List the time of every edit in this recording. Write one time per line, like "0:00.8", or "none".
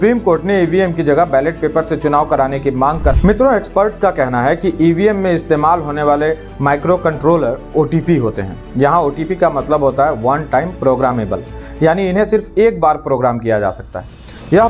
0:03.1